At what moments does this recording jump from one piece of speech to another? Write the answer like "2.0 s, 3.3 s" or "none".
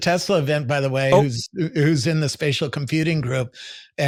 none